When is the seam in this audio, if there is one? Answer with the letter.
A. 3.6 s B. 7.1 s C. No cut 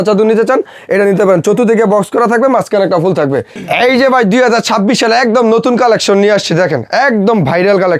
A